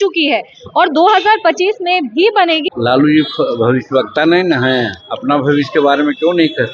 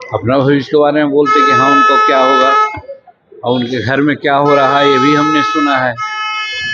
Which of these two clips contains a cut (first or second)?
first